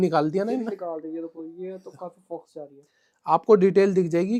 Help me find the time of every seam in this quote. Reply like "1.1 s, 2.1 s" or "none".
none